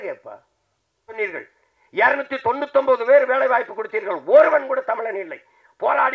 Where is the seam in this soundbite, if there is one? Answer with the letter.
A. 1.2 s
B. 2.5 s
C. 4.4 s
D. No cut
A